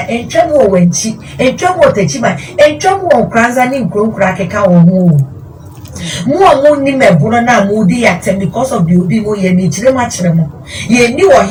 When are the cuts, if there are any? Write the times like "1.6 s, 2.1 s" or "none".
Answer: none